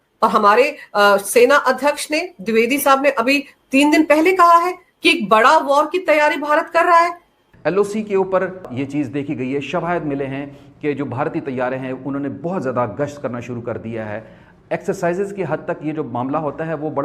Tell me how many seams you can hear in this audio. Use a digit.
2